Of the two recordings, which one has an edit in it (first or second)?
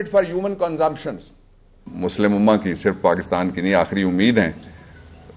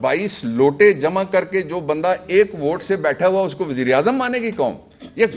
first